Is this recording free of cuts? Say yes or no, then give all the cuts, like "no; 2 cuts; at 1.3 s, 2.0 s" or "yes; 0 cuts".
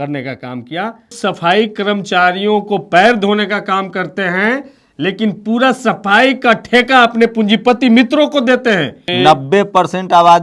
no; 2 cuts; at 1.1 s, 9.0 s